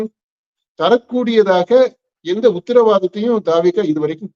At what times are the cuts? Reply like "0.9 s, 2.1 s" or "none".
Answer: none